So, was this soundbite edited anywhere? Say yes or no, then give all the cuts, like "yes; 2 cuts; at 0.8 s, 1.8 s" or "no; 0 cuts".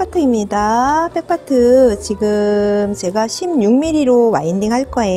no; 0 cuts